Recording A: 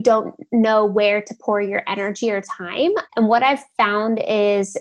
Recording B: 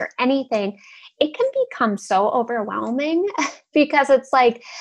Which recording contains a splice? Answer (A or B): A